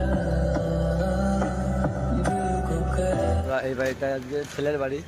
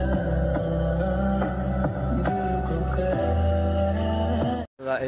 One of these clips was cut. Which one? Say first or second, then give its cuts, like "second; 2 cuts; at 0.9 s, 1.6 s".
first; 1 cut; at 3.4 s